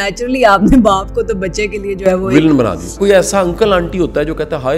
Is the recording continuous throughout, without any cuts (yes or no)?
no